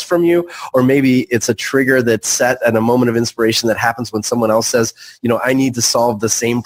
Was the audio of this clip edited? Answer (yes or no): no